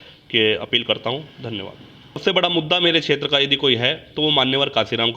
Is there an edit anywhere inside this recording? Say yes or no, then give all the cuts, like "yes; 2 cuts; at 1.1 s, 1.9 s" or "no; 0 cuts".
yes; 1 cut; at 2.2 s